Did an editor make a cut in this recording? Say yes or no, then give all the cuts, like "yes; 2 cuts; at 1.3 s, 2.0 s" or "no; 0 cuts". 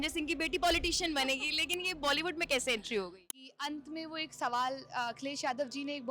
yes; 1 cut; at 3.2 s